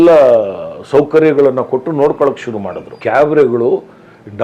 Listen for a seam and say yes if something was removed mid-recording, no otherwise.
yes